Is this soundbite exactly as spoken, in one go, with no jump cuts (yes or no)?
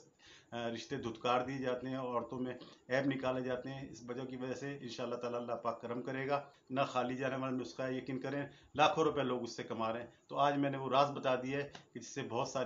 no